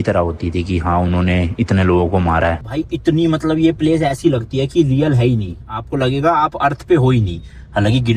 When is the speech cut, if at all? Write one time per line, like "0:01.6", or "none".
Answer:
0:02.7